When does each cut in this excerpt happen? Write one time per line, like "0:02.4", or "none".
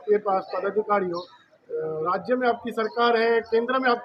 none